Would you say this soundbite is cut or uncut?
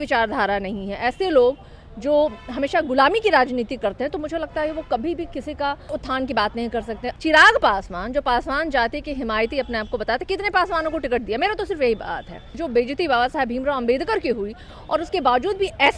cut